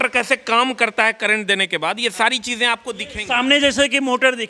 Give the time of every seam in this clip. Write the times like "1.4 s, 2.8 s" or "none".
none